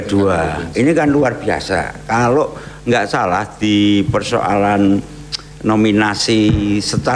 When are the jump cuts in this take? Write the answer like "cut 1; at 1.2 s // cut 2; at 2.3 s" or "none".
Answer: none